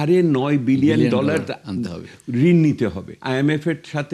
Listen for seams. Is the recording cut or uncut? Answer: cut